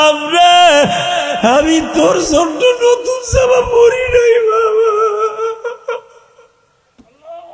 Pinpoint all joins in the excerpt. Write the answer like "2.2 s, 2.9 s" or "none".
none

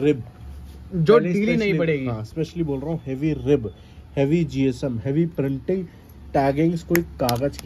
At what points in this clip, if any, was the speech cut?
none

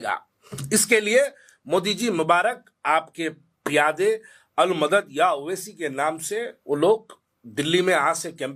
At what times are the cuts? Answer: none

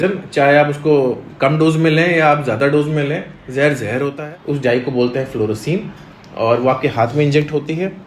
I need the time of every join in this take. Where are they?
4.2 s

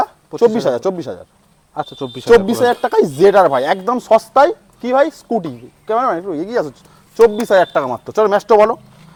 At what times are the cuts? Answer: none

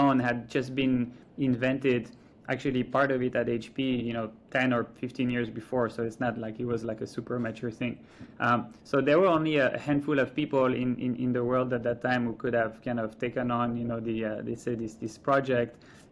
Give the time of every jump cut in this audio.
none

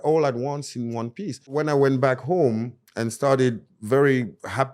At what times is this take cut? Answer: 1.5 s

